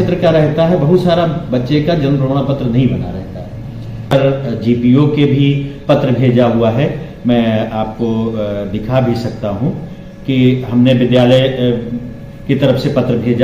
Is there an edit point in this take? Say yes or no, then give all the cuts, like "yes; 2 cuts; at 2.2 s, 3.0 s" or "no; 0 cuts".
yes; 1 cut; at 4.1 s